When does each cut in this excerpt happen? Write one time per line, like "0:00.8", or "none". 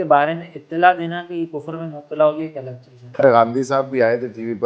0:03.2